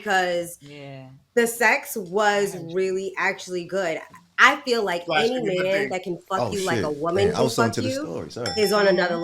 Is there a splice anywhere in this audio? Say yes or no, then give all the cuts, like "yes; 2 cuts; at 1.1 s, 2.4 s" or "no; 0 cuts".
yes; 1 cut; at 4.1 s